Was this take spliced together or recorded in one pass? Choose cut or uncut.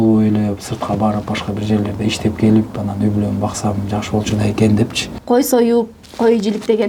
cut